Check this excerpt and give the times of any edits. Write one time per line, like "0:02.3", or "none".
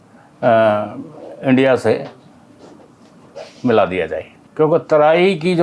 0:04.4